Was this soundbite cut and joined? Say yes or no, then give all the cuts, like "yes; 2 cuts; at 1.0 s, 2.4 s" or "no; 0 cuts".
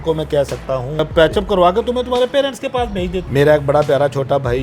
yes; 2 cuts; at 1.0 s, 3.2 s